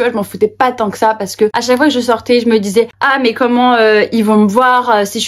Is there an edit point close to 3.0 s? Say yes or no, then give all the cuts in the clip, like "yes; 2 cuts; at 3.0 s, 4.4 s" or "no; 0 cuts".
yes; 2 cuts; at 1.6 s, 3.0 s